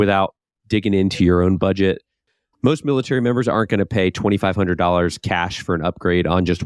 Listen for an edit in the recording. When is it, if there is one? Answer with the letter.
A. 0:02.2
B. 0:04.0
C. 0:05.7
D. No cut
A